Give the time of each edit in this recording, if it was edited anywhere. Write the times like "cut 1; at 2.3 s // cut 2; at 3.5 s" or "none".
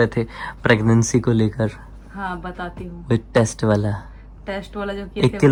none